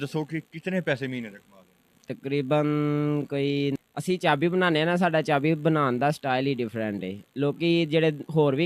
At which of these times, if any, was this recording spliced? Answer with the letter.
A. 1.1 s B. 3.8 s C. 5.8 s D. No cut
B